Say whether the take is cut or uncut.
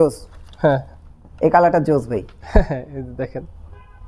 uncut